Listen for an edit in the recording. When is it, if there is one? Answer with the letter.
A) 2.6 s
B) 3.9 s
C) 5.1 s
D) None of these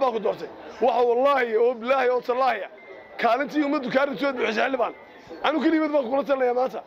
D